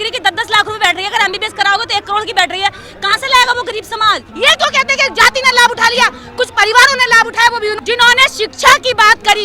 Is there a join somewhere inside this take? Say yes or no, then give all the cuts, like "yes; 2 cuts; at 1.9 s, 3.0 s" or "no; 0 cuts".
yes; 2 cuts; at 4.3 s, 7.8 s